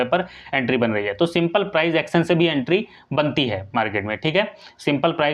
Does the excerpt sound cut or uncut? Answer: uncut